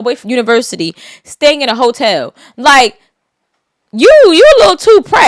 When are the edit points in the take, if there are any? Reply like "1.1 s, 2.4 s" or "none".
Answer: none